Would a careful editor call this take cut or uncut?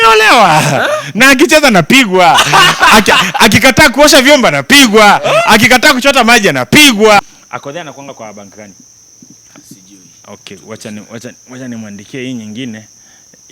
cut